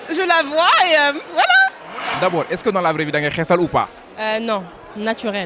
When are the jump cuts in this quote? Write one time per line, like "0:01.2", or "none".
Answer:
0:02.2